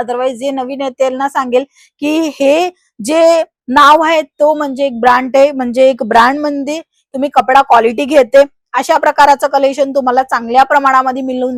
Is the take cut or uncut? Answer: uncut